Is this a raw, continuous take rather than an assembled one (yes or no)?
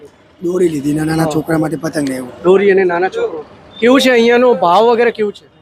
yes